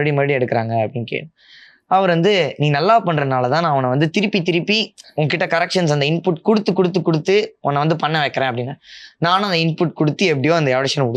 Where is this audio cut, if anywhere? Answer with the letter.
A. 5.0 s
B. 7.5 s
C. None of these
C